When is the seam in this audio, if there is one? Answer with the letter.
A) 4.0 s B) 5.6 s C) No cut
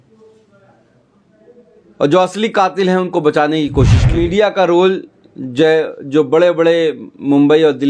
A